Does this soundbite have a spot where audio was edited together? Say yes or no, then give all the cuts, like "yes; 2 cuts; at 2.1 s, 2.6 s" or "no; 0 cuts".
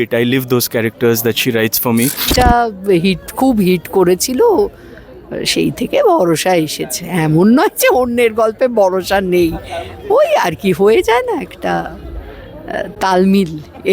yes; 1 cut; at 2.4 s